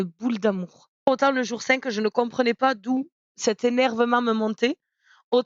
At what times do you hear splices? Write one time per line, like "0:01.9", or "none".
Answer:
0:01.1